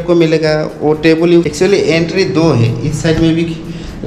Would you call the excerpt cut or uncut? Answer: cut